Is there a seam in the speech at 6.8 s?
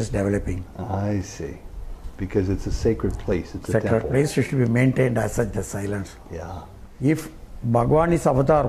yes; 1 cut; at 6.8 s

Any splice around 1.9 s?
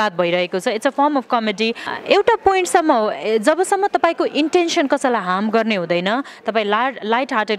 yes; 1 cut; at 1.9 s

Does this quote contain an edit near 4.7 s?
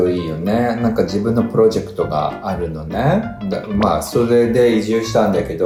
no; 0 cuts

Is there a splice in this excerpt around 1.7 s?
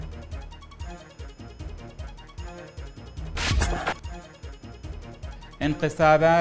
no; 0 cuts

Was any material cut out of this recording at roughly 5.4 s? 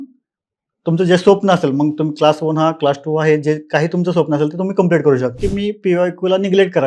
yes; 1 cut; at 5.4 s

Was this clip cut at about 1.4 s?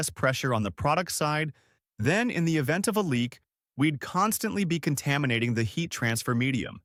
no; 0 cuts

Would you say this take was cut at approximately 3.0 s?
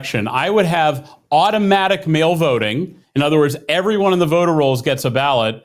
no; 0 cuts

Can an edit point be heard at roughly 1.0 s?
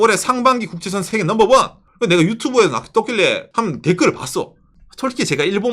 yes; 3 cuts; at 1.0 s, 1.8 s, 3.4 s

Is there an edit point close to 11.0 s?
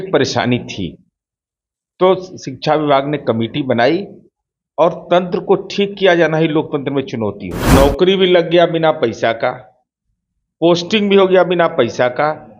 no; 1 cut; at 7.7 s

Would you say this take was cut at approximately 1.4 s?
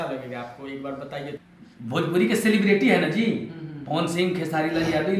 yes; 1 cut; at 1.4 s

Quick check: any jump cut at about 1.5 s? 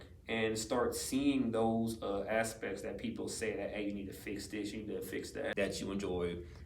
no; 1 cut; at 5.5 s

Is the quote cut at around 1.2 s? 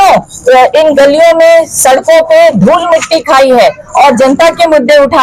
no; 0 cuts

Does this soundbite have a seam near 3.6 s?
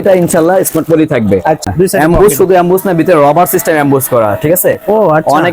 no; 1 cut; at 1.6 s

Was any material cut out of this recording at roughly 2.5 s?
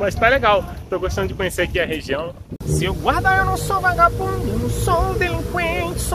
yes; 1 cut; at 2.5 s

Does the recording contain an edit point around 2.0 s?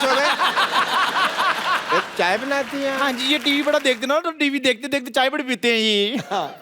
yes; 1 cut; at 2.0 s

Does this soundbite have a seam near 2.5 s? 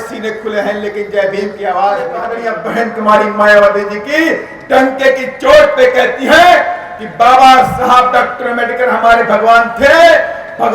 yes; 1 cut; at 2.5 s

